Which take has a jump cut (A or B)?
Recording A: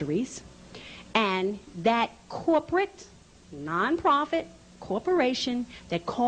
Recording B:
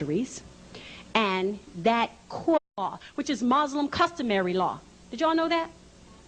A